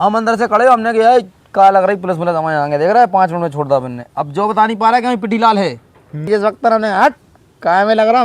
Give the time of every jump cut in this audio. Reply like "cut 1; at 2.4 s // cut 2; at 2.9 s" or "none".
cut 1; at 6.3 s